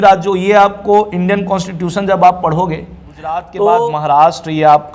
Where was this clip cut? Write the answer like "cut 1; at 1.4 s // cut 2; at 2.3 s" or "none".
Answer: cut 1; at 3.5 s